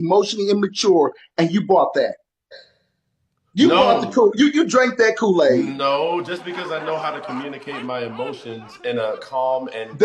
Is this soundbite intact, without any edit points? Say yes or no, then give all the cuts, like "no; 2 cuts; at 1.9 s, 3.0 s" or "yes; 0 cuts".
no; 1 cut; at 2.2 s